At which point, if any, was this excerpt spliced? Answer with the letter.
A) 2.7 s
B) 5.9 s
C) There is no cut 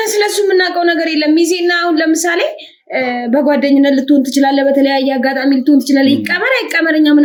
C